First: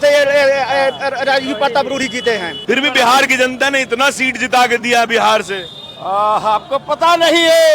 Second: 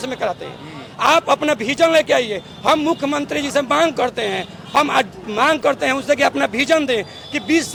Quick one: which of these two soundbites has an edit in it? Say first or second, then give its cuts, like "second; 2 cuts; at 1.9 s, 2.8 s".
first; 1 cut; at 2.5 s